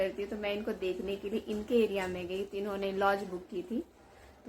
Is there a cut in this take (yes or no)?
no